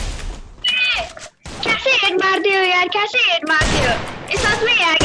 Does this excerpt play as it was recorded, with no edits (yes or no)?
yes